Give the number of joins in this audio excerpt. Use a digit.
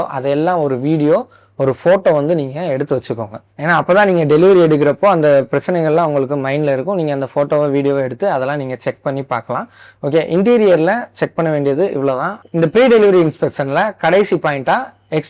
0